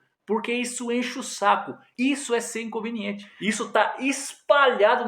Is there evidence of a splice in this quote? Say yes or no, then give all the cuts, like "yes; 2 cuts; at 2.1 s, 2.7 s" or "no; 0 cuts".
yes; 1 cut; at 1.8 s